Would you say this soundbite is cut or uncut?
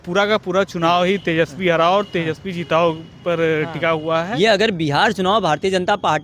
cut